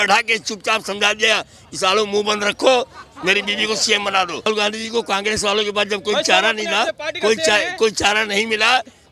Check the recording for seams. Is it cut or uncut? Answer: cut